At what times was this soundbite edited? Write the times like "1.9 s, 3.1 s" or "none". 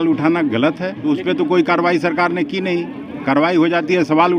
0.9 s